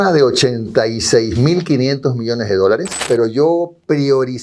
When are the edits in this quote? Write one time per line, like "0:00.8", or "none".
0:03.1